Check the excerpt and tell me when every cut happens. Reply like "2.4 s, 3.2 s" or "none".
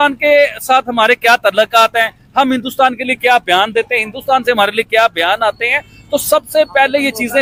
none